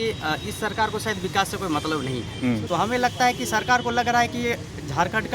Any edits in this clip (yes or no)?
yes